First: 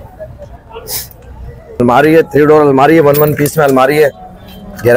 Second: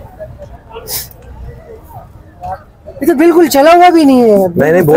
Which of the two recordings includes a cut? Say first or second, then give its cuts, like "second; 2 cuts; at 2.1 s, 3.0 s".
first; 1 cut; at 1.8 s